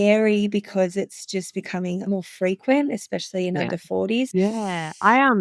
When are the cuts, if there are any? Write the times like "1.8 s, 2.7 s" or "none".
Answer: 2.0 s, 4.3 s

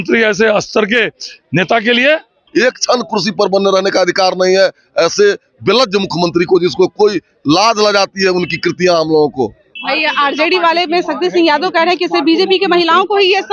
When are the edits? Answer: 2.4 s, 9.7 s

